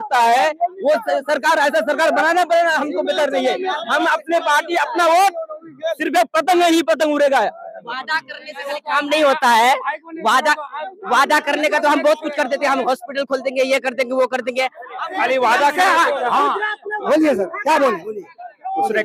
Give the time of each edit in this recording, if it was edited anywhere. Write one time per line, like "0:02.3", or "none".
none